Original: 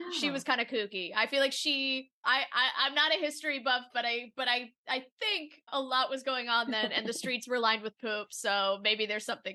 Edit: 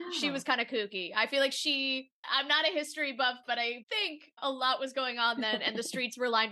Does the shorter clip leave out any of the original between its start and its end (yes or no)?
yes